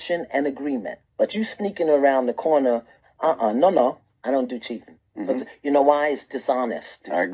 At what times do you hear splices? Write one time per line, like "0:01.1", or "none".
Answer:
none